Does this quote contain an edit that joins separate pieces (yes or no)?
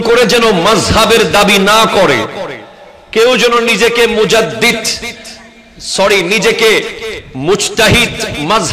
no